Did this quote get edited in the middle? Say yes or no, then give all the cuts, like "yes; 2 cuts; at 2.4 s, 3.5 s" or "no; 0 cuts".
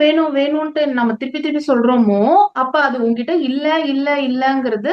no; 0 cuts